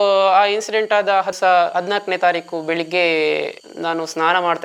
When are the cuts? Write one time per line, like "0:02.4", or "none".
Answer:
none